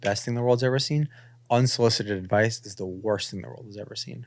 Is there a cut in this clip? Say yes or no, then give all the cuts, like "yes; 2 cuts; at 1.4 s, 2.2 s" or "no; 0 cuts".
no; 0 cuts